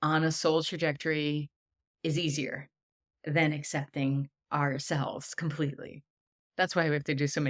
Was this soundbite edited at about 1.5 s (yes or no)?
no